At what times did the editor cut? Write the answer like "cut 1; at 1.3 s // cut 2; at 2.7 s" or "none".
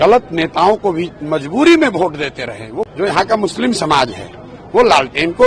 cut 1; at 2.7 s